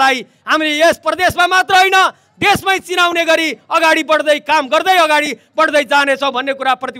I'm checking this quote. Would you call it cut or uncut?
uncut